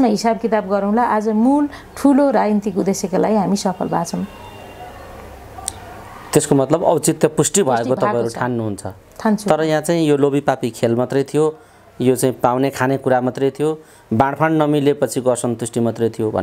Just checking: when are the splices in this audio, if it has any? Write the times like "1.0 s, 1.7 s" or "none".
none